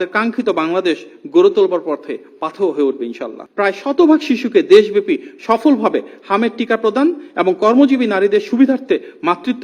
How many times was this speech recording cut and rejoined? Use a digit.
1